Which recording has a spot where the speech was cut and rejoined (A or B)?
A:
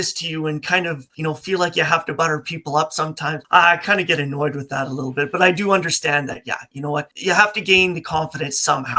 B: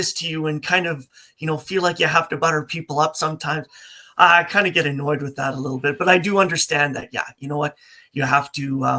A